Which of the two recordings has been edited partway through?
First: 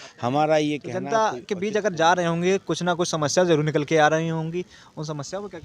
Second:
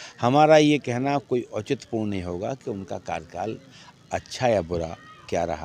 first; 1 cut; at 0.9 s

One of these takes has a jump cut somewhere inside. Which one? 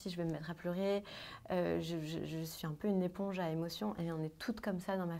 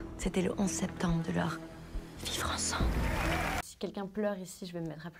second; 1 cut; at 3.6 s

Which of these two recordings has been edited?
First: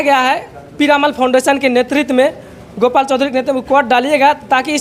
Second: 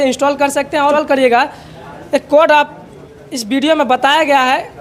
second; 1 cut; at 0.9 s

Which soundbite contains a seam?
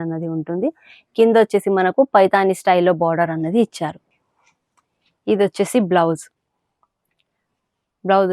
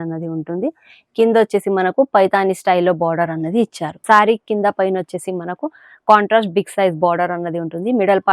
second; 1 cut; at 3.9 s

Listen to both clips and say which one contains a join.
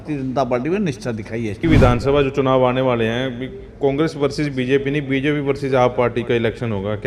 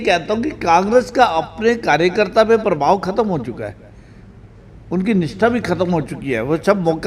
first; 1 cut; at 1.6 s

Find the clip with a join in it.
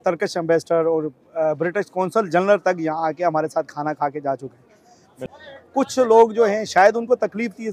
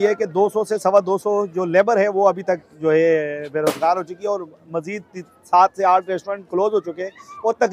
first; 1 cut; at 5.2 s

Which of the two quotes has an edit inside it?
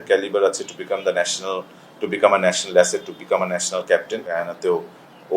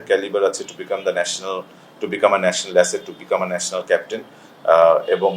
first; 1 cut; at 4.5 s

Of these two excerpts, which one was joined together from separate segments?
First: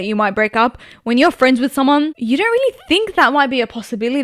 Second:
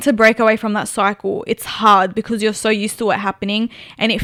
first; 1 cut; at 2.2 s

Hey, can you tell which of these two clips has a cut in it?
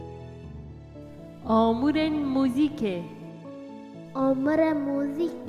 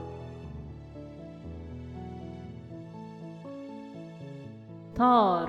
first; 1 cut; at 1.4 s

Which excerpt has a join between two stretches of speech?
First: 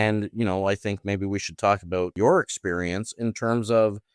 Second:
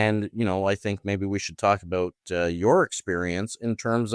first; 1 cut; at 2.1 s

